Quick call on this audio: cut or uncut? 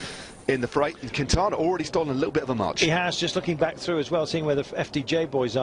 uncut